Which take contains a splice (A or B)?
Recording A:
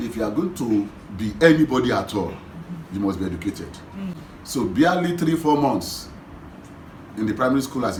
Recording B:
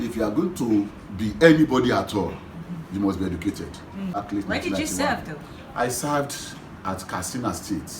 B